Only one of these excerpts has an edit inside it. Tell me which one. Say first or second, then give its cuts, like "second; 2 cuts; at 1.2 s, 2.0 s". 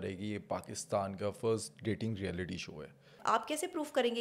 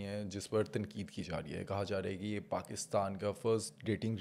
first; 1 cut; at 3.1 s